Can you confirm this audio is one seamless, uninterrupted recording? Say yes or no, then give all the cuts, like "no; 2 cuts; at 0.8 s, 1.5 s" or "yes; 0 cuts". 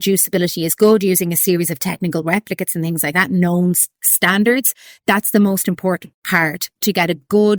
yes; 0 cuts